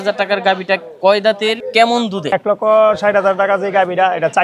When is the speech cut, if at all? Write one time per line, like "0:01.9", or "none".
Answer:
0:01.6
0:02.3